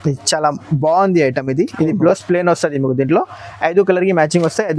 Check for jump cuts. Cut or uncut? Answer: uncut